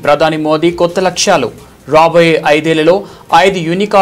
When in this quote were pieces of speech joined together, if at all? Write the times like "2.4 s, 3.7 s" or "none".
none